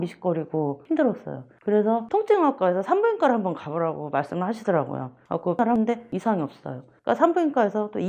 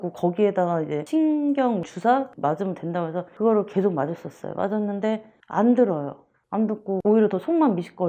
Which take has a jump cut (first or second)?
first